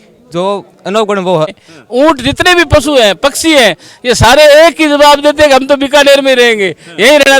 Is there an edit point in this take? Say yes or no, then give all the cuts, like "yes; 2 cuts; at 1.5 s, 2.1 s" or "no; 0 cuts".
yes; 1 cut; at 1.6 s